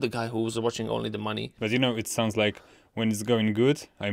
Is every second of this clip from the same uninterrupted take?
no; 1 cut; at 1.5 s

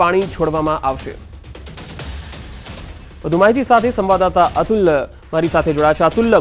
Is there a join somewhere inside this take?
no; 0 cuts

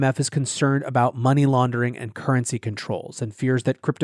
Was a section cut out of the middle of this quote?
no; 0 cuts

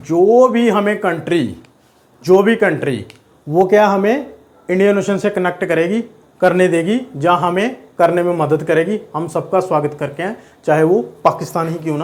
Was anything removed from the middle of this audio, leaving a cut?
no; 0 cuts

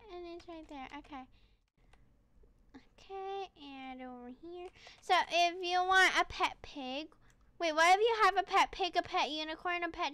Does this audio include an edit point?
yes; 1 cut; at 1.6 s

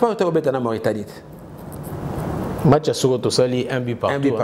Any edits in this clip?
no; 0 cuts

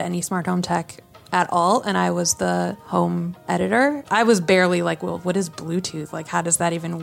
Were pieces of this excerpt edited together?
yes; 1 cut; at 4.0 s

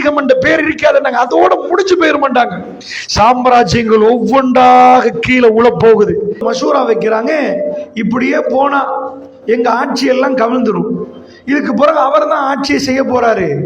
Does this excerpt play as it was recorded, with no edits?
no; 2 cuts; at 6.4 s, 7.8 s

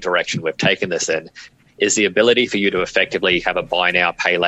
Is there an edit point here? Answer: no; 0 cuts

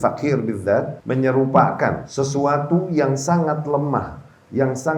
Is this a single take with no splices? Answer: no; 2 cuts; at 1.0 s, 2.0 s

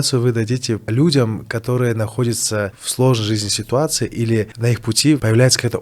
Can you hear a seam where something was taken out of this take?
yes; 3 cuts; at 0.9 s, 2.8 s, 4.7 s

